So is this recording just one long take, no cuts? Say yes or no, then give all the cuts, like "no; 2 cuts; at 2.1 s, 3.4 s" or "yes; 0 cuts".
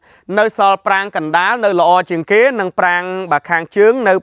yes; 0 cuts